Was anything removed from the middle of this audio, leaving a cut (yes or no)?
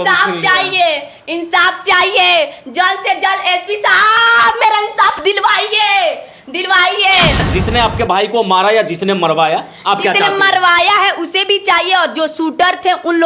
yes